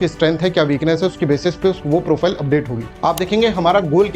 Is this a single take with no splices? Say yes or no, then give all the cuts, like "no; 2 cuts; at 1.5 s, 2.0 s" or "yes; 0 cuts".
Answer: no; 1 cut; at 2.8 s